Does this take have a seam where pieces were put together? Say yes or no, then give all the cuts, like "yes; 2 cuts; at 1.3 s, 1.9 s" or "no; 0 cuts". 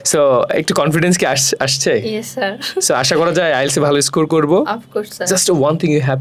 no; 0 cuts